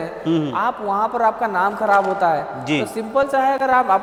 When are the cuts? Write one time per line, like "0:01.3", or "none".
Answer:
none